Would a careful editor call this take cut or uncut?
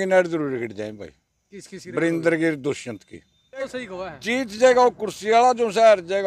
cut